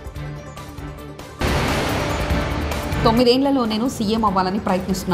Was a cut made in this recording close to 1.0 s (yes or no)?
no